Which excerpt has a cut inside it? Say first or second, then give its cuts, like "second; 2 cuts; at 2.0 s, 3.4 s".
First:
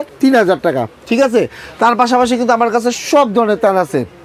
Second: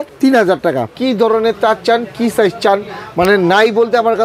second; 1 cut; at 0.9 s